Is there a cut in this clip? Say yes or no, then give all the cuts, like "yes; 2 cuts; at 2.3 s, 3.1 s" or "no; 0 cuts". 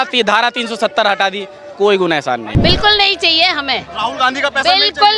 yes; 1 cut; at 2.5 s